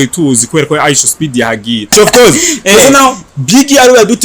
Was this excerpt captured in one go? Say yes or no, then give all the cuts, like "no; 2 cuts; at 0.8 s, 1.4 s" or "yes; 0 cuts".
no; 1 cut; at 1.9 s